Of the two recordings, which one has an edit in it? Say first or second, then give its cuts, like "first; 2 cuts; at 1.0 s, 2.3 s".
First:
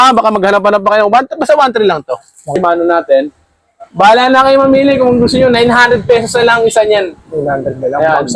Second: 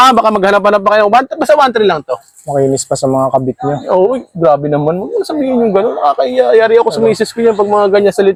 first; 1 cut; at 2.5 s